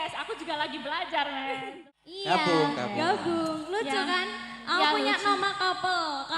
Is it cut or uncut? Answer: cut